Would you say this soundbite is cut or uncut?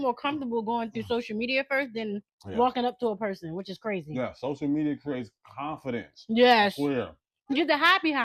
uncut